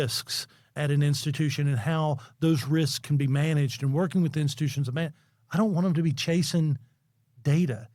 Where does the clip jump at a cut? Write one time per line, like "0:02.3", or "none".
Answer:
none